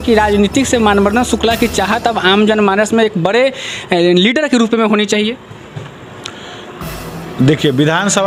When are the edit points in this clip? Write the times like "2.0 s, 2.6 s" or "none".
none